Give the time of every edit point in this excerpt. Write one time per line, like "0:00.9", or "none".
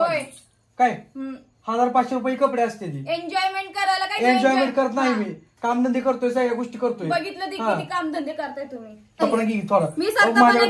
0:09.2